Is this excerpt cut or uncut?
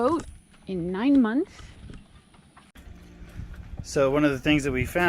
cut